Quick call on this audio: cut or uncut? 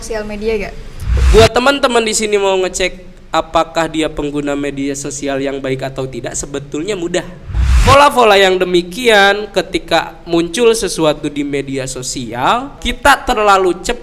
cut